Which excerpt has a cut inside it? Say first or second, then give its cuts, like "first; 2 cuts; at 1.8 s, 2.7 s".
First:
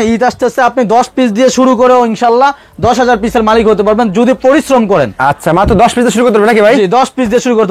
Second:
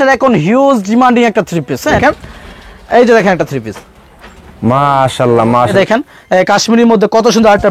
second; 2 cuts; at 2.0 s, 5.7 s